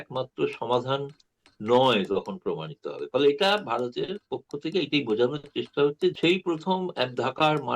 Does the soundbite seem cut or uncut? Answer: cut